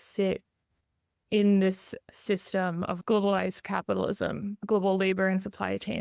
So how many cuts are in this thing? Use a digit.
2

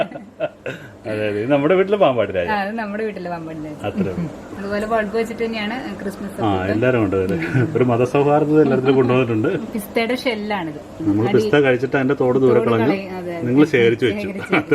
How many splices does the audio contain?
3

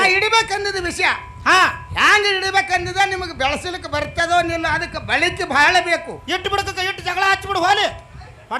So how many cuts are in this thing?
0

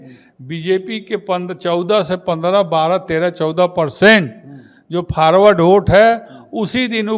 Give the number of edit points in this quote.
0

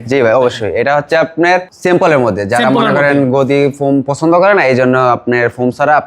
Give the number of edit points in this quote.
1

